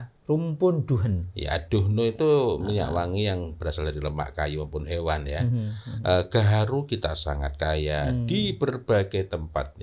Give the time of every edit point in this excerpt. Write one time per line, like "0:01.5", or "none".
none